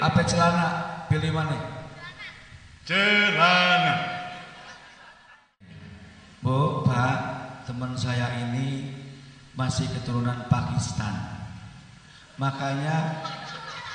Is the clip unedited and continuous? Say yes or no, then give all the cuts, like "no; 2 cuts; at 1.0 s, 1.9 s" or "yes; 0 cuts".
no; 1 cut; at 5.9 s